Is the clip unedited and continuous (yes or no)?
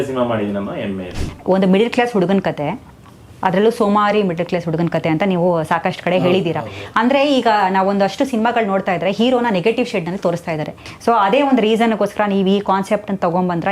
no